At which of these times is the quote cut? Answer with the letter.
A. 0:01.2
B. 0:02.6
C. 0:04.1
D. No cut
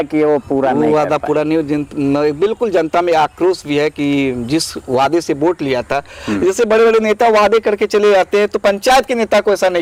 D